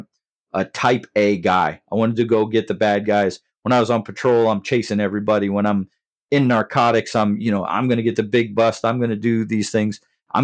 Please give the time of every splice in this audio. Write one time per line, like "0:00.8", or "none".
none